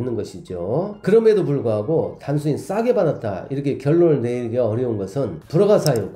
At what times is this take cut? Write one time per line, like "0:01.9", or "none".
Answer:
none